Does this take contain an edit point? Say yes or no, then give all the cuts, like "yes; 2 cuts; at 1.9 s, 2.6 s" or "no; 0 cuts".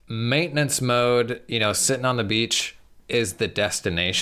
no; 0 cuts